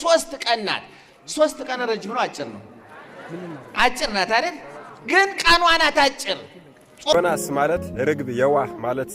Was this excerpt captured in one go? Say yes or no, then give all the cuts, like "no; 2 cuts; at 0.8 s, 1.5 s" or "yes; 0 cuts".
no; 1 cut; at 7.1 s